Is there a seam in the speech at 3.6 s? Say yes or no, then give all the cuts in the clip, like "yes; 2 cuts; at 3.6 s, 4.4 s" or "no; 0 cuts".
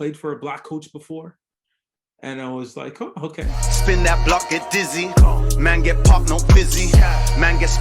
yes; 1 cut; at 3.6 s